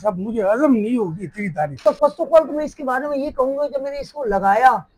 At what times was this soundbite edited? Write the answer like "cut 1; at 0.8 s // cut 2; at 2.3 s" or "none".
cut 1; at 1.7 s